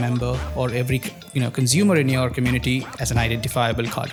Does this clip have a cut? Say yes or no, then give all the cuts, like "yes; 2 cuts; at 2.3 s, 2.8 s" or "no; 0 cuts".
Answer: no; 0 cuts